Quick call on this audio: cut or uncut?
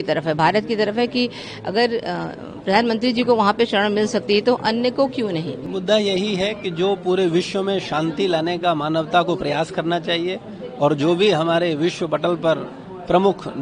cut